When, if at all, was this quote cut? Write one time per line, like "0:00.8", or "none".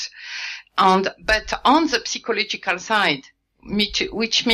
0:01.4